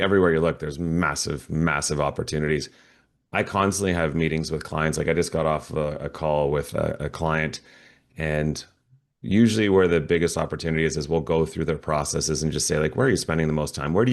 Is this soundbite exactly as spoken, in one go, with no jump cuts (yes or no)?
yes